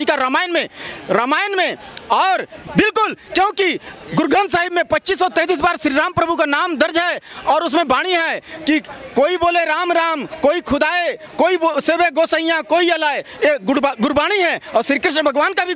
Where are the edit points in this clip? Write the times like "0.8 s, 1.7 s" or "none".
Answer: 2.5 s